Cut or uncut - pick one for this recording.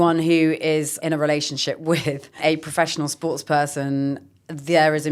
cut